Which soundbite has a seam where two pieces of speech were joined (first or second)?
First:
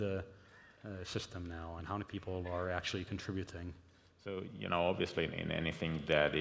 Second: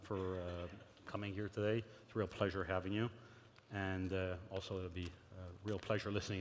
second